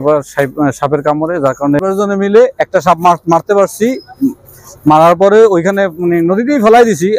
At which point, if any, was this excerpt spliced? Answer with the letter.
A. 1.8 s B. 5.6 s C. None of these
A